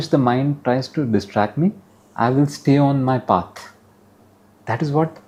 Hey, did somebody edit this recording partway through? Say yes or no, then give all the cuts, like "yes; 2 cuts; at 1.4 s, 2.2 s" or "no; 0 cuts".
no; 0 cuts